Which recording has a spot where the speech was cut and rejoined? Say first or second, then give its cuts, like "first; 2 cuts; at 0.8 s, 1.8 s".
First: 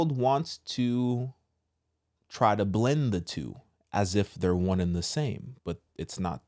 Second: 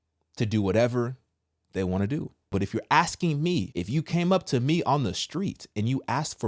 second; 2 cuts; at 2.5 s, 3.7 s